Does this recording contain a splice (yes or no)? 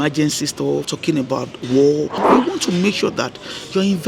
yes